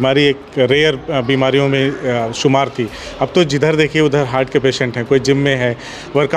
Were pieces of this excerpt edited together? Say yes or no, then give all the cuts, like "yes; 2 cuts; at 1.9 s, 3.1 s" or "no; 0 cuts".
no; 0 cuts